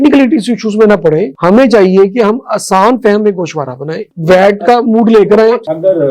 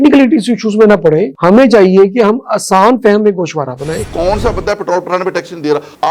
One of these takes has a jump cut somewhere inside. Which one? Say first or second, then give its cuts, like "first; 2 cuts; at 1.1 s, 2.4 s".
second; 1 cut; at 4.0 s